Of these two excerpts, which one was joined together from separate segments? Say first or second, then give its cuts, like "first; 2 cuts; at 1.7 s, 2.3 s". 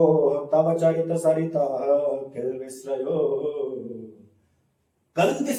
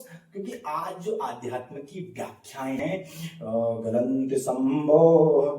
second; 1 cut; at 2.8 s